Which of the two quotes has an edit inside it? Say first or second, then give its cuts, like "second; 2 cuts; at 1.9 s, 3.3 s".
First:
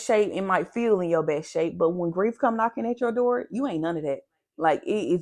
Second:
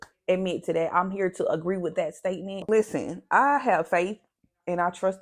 second; 1 cut; at 2.6 s